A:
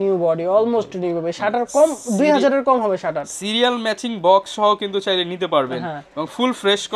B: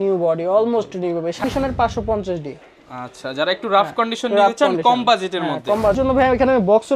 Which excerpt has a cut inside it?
B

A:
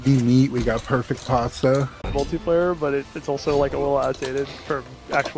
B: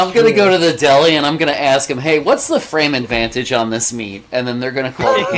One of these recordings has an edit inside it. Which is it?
A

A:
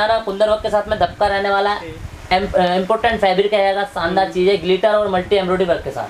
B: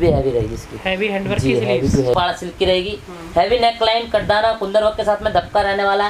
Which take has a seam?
B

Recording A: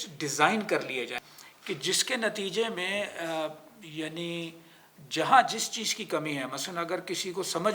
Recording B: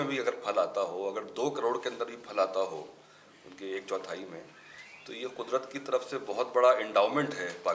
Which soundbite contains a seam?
A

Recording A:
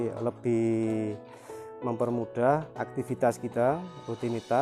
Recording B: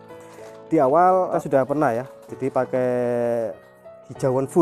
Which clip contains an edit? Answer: B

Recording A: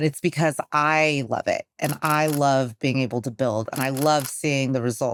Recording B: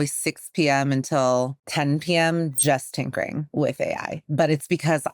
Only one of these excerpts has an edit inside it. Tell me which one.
B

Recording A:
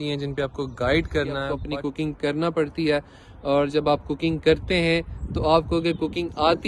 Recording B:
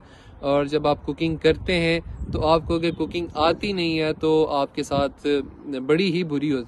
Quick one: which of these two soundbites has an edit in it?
A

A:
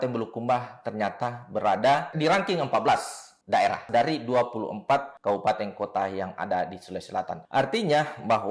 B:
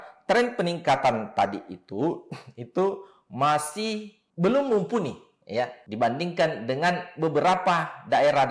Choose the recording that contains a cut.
A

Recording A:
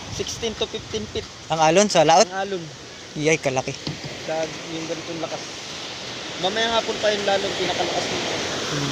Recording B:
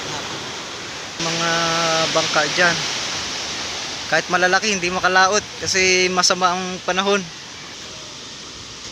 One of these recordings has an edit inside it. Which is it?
B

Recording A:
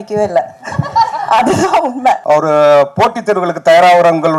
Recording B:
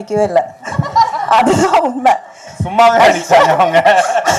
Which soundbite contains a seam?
A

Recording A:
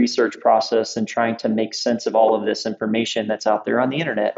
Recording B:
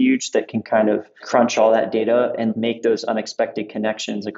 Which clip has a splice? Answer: B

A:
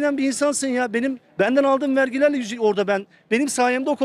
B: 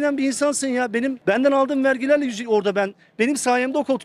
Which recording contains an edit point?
B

